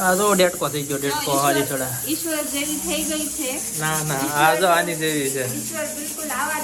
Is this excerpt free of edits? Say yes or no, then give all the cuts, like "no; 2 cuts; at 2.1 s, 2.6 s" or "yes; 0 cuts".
yes; 0 cuts